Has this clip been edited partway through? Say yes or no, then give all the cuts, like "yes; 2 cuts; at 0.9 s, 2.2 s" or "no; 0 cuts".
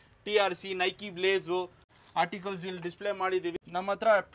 yes; 2 cuts; at 1.9 s, 3.5 s